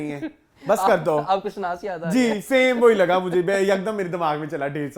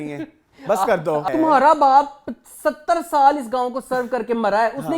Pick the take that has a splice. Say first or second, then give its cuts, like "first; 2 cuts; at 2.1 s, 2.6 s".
second; 1 cut; at 1.3 s